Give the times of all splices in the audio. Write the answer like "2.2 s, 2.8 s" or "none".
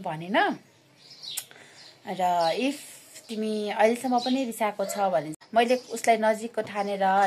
5.4 s